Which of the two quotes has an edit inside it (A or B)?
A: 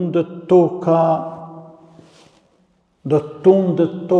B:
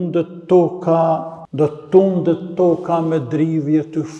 B